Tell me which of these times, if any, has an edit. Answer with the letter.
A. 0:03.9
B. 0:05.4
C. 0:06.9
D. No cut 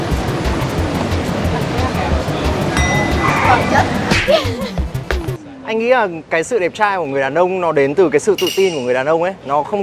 B